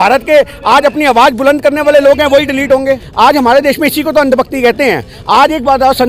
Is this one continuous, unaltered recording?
no; 1 cut; at 2.9 s

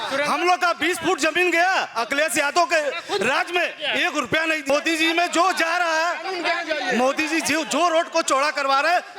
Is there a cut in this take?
yes; 1 cut; at 4.7 s

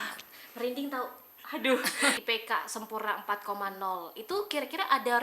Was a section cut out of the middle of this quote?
yes; 1 cut; at 2.2 s

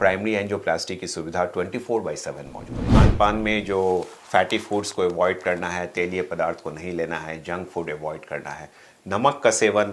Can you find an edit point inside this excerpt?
yes; 1 cut; at 2.9 s

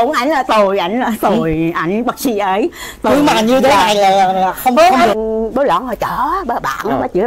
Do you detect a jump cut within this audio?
yes; 1 cut; at 5.2 s

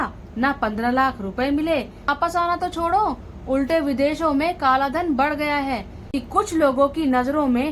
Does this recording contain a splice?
yes; 2 cuts; at 2.1 s, 6.0 s

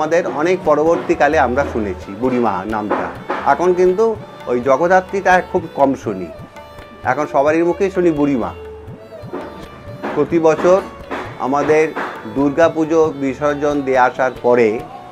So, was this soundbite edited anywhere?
no; 0 cuts

